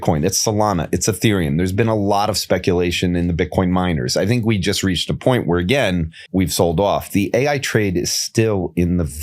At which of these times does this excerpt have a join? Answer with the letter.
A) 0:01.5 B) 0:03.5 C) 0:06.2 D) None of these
C